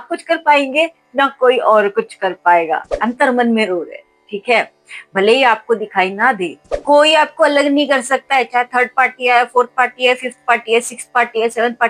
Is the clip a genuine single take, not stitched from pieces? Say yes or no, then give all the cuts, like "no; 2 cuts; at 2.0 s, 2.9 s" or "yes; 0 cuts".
no; 2 cuts; at 3.0 s, 6.7 s